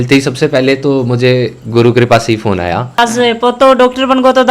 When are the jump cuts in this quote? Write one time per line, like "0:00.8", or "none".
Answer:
0:02.8